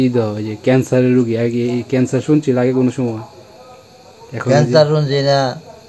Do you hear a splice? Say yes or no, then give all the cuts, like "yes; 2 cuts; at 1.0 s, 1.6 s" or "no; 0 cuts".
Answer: no; 0 cuts